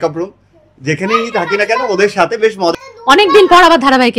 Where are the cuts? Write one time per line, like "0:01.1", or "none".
0:02.7

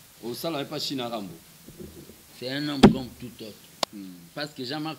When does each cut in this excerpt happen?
0:03.9

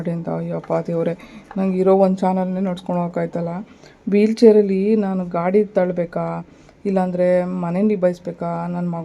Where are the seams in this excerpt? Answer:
none

